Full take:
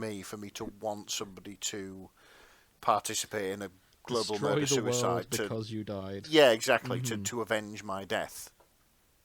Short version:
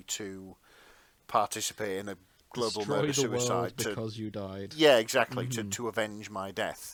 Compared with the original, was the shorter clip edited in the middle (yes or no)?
no